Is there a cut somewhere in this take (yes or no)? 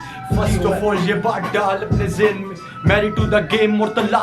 no